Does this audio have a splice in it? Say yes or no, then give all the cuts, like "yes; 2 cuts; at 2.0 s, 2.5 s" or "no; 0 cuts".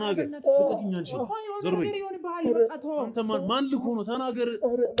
no; 0 cuts